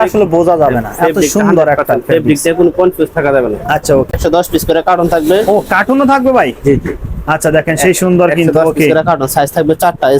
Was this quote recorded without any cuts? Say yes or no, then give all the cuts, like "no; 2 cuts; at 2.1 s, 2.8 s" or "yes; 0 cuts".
no; 1 cut; at 4.1 s